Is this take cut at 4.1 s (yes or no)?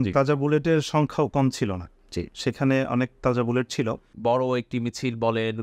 yes